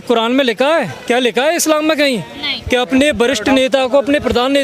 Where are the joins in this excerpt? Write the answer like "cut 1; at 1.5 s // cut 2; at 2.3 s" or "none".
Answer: cut 1; at 0.9 s